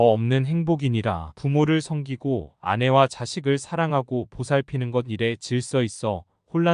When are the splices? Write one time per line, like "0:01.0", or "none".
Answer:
0:01.3